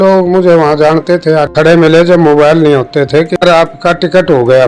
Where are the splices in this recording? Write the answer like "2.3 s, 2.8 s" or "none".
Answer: 1.5 s, 3.4 s